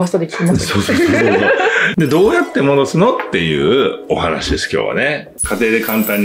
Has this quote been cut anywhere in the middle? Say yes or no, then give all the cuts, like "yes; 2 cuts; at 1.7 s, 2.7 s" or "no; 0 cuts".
yes; 2 cuts; at 1.9 s, 5.3 s